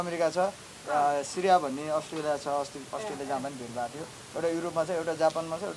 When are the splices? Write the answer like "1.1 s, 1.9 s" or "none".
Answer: none